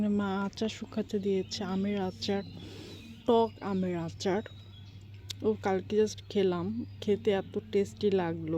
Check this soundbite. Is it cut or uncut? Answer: uncut